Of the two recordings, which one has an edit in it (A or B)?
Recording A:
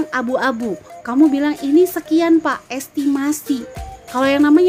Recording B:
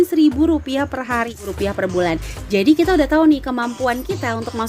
B